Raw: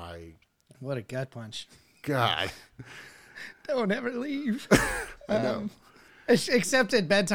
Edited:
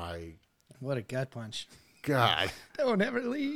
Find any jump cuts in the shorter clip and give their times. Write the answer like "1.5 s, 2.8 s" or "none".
2.6 s

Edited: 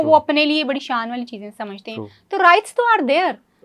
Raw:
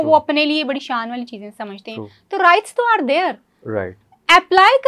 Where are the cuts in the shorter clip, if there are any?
none

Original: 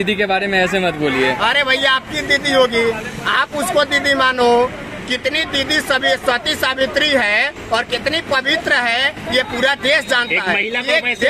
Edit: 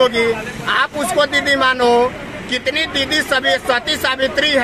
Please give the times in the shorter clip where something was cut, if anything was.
none

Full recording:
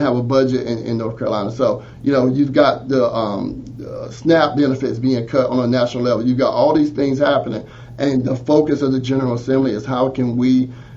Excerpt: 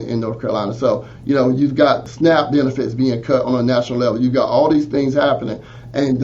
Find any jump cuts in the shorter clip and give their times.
2.0 s

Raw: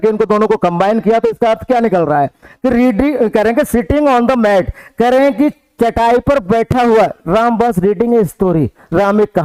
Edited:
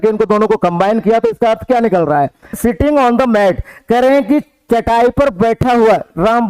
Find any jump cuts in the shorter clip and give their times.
2.6 s

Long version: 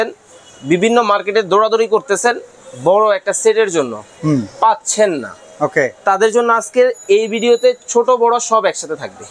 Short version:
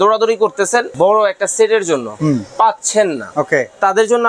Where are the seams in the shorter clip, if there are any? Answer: 0.9 s, 2.1 s, 3.2 s

